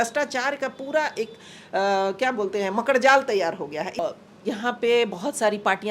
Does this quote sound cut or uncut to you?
cut